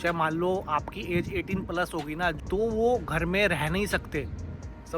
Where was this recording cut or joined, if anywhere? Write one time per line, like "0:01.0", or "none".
0:02.4